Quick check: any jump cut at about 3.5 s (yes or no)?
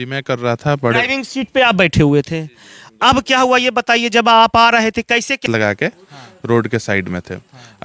no